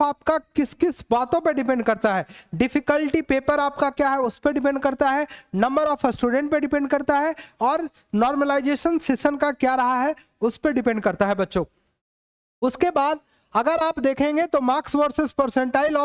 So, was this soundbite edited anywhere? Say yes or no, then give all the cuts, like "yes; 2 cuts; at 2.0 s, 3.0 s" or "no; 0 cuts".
no; 0 cuts